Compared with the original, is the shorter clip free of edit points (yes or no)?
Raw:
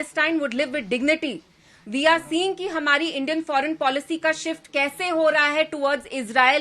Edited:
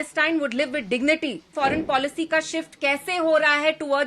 no